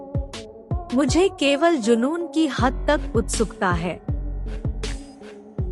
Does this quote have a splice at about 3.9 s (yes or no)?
yes